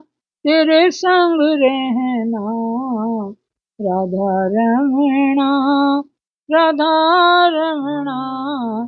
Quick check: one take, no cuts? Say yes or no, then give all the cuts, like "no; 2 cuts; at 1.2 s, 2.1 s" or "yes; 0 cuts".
yes; 0 cuts